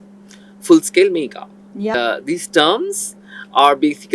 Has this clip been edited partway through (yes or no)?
yes